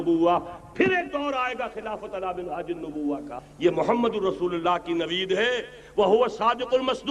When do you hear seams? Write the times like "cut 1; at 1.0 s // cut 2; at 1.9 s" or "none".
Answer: cut 1; at 3.4 s